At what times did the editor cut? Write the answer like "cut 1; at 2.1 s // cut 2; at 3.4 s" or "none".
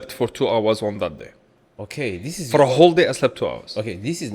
none